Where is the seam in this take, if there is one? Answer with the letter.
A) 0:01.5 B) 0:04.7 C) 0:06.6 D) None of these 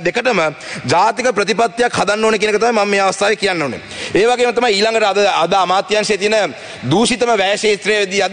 D